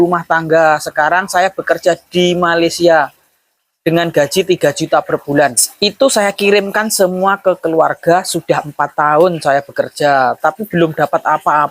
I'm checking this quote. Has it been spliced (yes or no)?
yes